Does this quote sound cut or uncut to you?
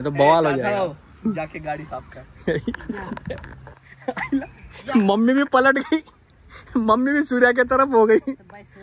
uncut